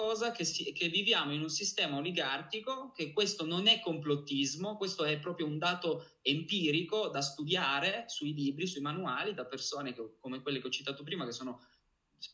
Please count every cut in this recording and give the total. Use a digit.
0